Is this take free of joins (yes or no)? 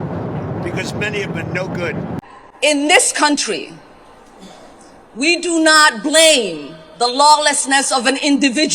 no